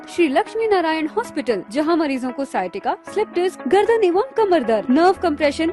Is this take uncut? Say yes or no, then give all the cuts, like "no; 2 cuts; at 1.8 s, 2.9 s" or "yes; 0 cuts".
yes; 0 cuts